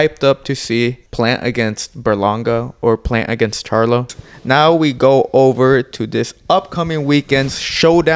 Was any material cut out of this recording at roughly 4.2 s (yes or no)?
yes